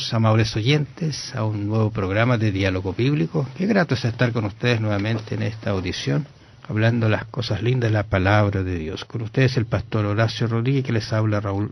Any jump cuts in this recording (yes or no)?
no